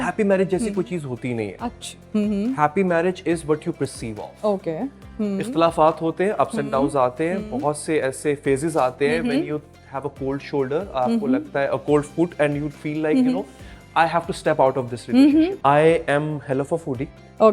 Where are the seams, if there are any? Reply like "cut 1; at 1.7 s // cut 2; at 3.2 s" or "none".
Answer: cut 1; at 15.5 s

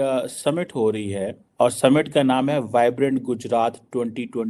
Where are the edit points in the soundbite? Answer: cut 1; at 1.4 s

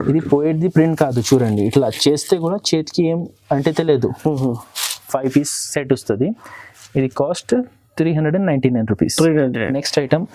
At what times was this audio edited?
none

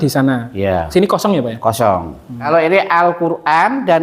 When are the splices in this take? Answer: cut 1; at 2.3 s

